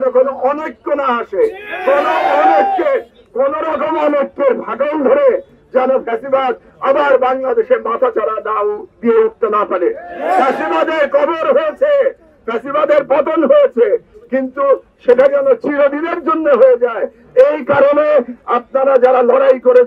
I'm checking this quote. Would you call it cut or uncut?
uncut